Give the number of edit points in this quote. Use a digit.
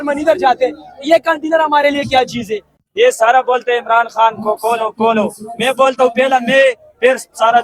1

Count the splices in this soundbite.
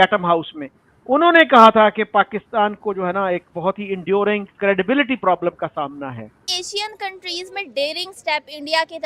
1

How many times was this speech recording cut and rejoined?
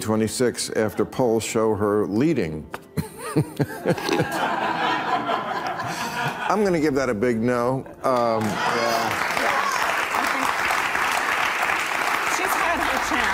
0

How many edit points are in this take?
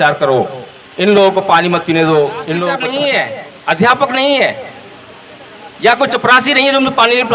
1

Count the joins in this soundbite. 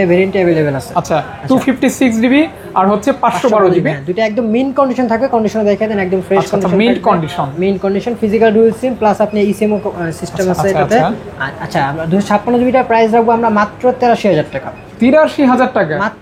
0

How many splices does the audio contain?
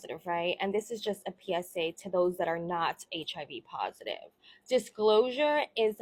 0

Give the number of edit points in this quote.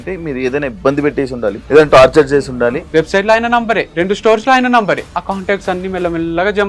4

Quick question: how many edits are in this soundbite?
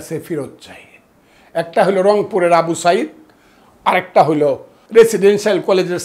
1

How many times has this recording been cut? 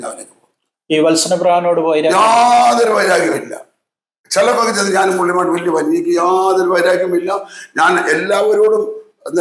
0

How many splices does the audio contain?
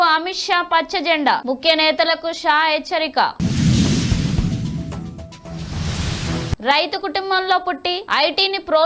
0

